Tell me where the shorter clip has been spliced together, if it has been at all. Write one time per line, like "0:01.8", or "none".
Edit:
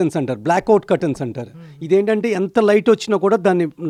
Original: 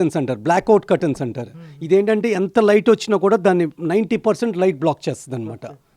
none